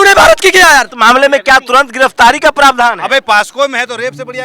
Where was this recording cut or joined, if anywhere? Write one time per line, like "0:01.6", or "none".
0:00.9